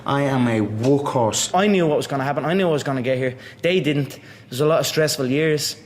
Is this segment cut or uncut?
cut